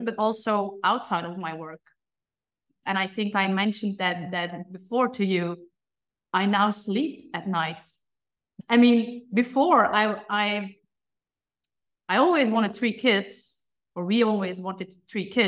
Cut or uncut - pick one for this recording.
cut